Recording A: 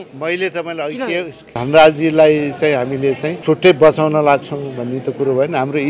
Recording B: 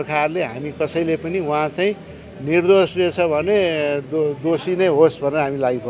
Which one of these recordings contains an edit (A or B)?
A